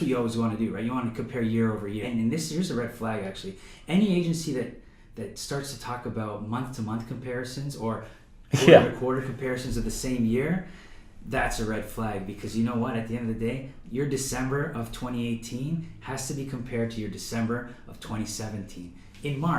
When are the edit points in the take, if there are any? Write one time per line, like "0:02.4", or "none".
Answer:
0:02.1